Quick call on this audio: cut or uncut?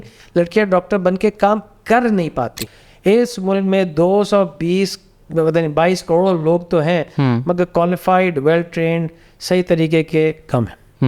cut